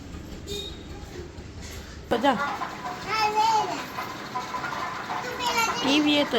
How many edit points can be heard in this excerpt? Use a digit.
1